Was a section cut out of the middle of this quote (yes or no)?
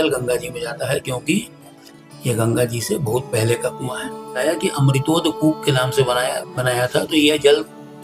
yes